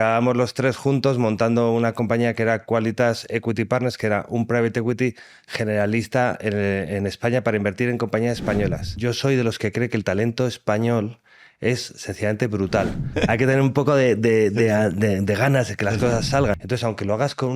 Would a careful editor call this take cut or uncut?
cut